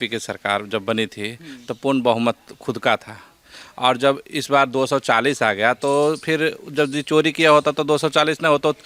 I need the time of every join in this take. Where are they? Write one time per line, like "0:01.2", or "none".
none